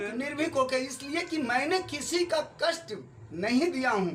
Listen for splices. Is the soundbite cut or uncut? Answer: uncut